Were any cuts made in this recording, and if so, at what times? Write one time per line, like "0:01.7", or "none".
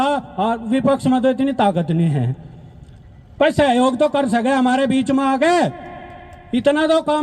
none